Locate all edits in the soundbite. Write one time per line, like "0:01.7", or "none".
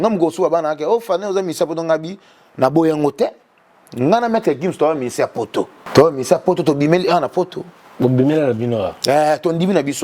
0:05.8